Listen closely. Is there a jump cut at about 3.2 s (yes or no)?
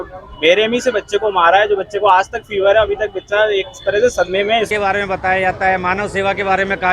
no